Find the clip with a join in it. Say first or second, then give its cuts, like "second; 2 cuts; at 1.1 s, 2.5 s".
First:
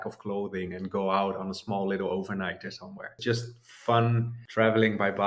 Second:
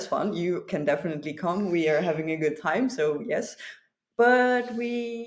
first; 2 cuts; at 3.2 s, 4.4 s